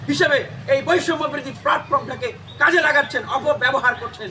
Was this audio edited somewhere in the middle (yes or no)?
no